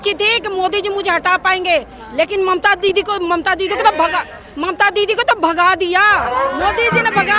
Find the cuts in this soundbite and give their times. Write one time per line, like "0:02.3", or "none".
none